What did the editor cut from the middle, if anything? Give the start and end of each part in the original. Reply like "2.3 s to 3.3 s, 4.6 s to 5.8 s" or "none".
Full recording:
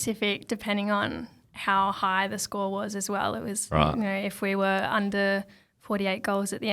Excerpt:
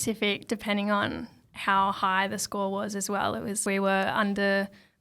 3.6 s to 4.4 s